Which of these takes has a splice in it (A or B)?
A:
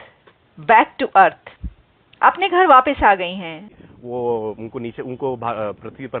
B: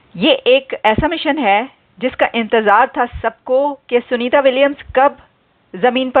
A